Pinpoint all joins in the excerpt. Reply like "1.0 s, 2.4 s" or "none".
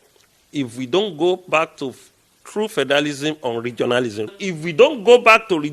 4.3 s